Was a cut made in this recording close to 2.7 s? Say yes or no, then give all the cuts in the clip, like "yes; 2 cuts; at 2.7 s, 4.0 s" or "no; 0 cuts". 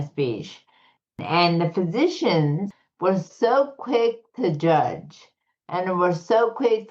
yes; 2 cuts; at 1.2 s, 2.7 s